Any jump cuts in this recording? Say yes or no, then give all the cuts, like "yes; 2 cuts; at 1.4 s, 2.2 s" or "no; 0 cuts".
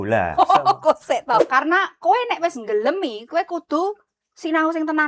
yes; 1 cut; at 1.4 s